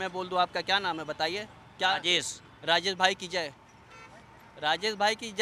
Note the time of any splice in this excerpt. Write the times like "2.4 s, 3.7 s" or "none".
none